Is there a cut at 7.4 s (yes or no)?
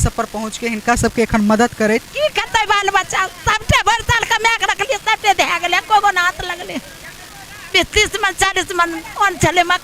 no